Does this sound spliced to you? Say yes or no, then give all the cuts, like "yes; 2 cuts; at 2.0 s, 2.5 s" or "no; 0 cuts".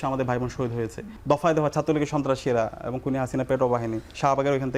yes; 1 cut; at 1.1 s